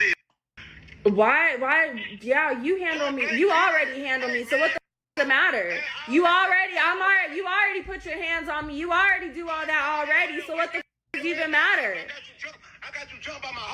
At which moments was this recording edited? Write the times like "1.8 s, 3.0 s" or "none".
none